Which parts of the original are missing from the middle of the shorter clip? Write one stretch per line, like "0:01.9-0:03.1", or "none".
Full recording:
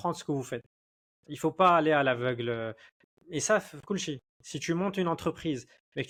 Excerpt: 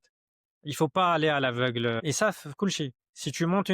0:02.6-0:03.3